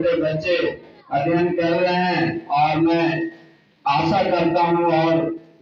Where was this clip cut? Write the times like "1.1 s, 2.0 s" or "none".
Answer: none